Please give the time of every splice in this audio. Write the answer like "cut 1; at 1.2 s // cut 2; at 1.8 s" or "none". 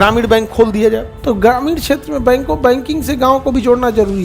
cut 1; at 1.1 s